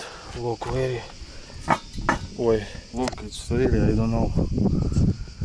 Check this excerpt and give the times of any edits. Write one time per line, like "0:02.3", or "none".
0:02.8